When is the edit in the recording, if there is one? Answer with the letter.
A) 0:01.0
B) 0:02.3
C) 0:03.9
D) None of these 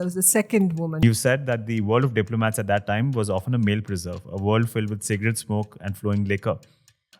A